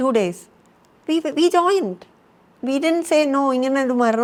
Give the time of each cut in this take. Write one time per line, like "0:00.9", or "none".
none